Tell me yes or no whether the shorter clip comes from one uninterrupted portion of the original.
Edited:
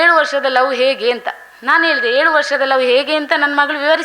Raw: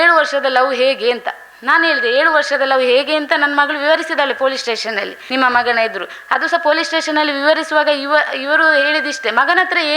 yes